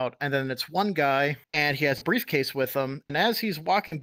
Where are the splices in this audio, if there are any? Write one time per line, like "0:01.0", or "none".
0:01.4